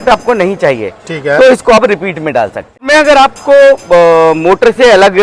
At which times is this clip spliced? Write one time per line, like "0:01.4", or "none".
0:02.8